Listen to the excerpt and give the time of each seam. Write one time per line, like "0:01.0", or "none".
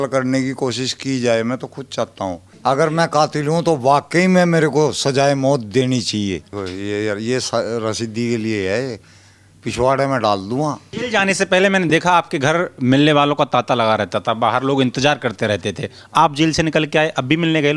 0:02.5
0:06.5
0:10.9